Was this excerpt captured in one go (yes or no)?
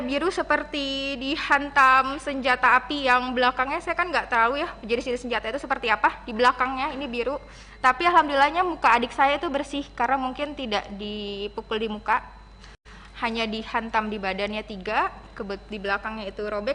yes